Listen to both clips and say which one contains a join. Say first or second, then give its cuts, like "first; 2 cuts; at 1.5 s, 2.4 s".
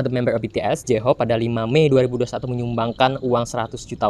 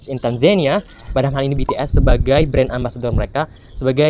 second; 1 cut; at 1.1 s